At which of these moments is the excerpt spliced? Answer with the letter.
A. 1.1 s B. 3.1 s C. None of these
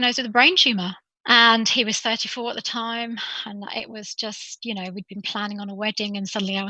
A